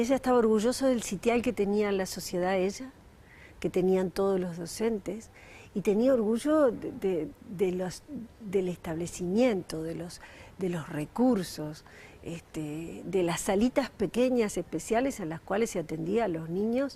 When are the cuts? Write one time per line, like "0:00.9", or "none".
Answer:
0:08.4